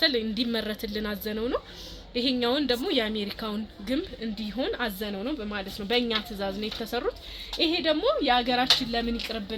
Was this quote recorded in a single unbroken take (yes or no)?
yes